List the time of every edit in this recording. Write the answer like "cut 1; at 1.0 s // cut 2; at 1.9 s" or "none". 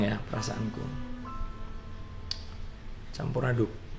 none